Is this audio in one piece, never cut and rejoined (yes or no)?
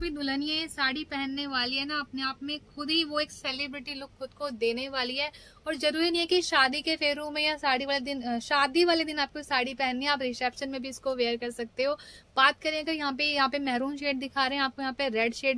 yes